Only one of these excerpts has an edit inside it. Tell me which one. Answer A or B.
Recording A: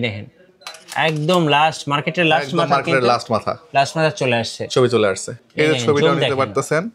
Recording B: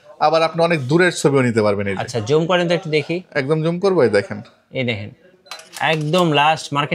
A